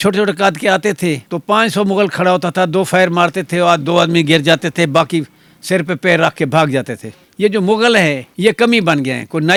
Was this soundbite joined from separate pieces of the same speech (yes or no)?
no